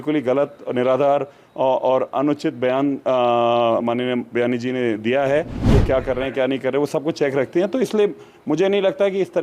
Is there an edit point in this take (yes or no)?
yes